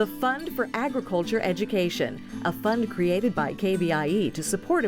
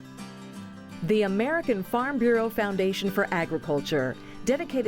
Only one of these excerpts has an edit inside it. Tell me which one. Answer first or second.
second